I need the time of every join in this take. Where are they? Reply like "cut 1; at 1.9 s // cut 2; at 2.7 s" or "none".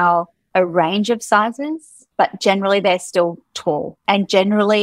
cut 1; at 3.9 s